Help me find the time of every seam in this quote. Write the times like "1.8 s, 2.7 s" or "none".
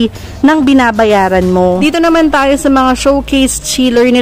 1.8 s